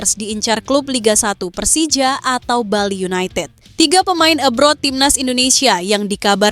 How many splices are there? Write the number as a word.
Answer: one